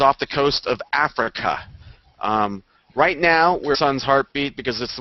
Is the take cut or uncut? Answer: uncut